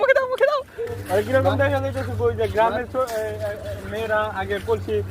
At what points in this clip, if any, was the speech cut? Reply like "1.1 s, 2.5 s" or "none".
0.9 s